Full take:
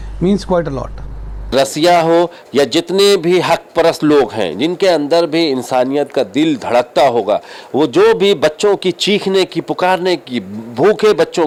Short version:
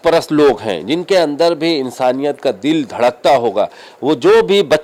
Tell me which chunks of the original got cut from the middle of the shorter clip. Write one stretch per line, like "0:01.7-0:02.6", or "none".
none